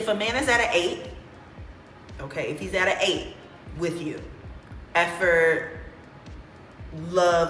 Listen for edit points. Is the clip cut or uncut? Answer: uncut